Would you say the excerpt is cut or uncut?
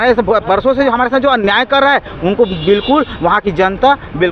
uncut